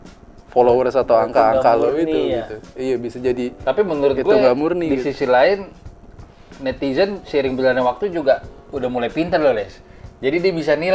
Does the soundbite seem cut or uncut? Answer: uncut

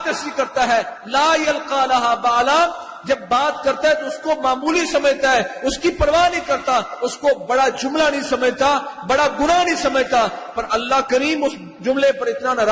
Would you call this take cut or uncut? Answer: uncut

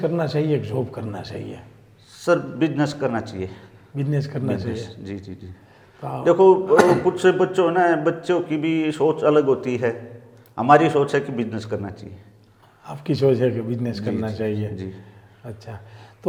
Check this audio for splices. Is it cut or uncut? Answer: uncut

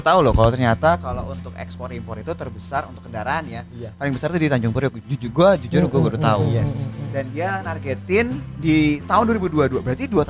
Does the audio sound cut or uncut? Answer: uncut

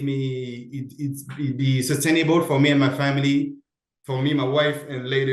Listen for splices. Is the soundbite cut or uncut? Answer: uncut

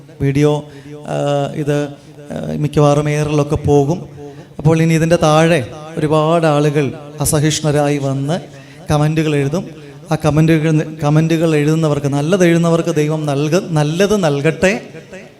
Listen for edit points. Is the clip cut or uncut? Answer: uncut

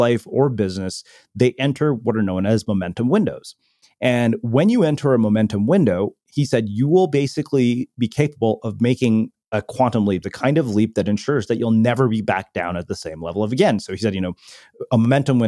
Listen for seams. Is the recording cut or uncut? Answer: uncut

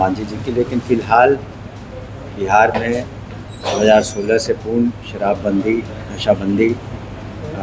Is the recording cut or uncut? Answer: uncut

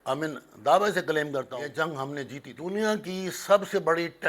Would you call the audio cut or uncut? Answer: cut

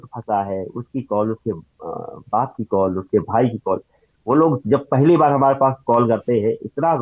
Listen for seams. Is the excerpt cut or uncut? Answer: uncut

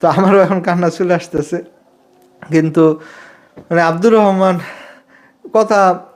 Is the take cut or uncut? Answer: uncut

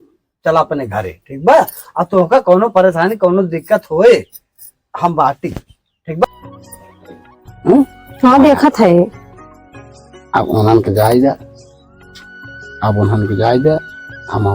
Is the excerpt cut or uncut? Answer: cut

